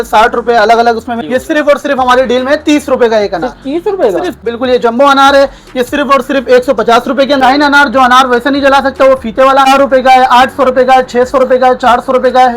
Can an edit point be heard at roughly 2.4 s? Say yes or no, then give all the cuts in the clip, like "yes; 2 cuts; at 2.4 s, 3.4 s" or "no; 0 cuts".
no; 4 cuts; at 1.2 s, 4.4 s, 7.4 s, 9.7 s